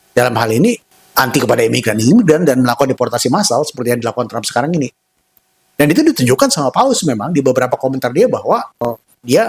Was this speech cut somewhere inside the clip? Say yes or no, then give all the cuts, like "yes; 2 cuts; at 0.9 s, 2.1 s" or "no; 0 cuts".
yes; 1 cut; at 0.9 s